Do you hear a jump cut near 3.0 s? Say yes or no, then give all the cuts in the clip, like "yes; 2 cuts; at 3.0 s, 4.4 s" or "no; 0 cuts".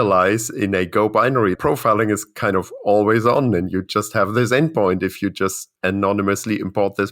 no; 2 cuts; at 1.6 s, 5.7 s